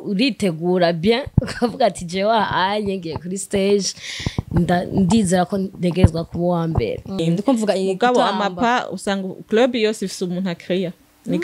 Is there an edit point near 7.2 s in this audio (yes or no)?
yes